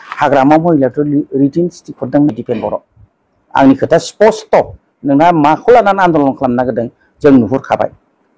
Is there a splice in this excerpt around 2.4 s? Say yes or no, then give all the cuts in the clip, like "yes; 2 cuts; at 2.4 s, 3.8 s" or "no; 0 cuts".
yes; 1 cut; at 2.4 s